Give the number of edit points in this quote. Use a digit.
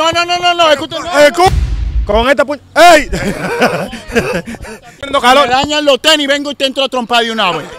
2